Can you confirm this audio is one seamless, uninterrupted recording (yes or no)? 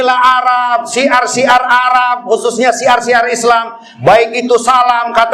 yes